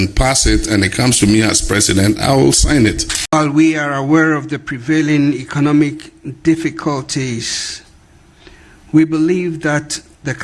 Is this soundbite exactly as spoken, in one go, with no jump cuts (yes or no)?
no